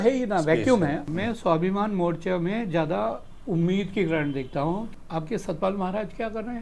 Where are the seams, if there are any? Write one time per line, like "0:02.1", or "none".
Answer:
0:01.1
0:04.9